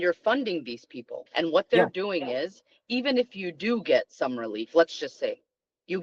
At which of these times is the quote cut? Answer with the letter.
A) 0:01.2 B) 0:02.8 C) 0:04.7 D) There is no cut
A